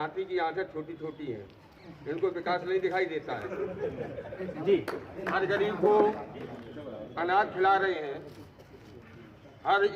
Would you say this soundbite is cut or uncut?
uncut